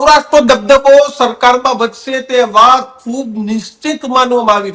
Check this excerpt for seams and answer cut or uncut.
uncut